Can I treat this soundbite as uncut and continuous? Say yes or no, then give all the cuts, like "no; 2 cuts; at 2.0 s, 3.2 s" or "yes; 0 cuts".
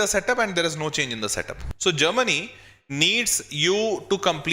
no; 1 cut; at 1.6 s